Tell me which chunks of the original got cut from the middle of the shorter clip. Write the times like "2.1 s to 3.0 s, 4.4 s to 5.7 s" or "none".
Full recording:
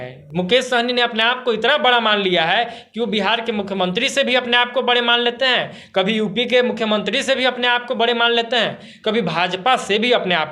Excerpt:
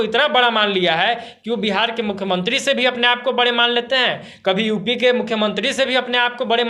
none